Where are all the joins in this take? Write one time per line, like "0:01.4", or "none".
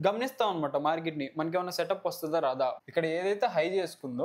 0:02.8